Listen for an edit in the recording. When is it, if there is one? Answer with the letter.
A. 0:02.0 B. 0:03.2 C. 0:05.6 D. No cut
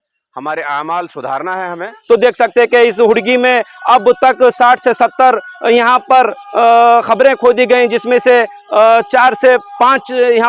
A